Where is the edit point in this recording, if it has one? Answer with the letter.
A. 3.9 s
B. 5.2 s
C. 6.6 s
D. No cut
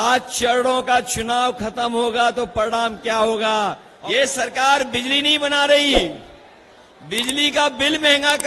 A